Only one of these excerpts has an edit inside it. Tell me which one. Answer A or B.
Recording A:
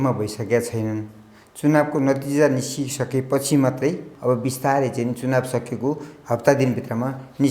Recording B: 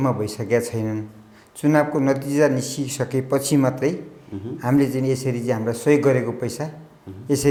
A